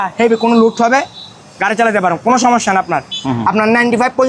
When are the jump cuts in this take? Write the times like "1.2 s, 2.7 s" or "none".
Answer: 3.2 s